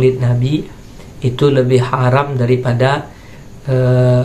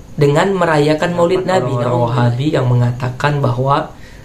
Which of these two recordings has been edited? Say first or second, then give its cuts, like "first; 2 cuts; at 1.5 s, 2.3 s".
second; 1 cut; at 1.8 s